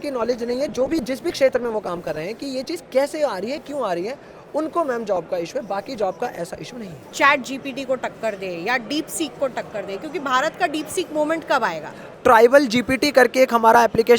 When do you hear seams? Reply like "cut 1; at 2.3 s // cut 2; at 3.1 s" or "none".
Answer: cut 1; at 7.0 s // cut 2; at 12.0 s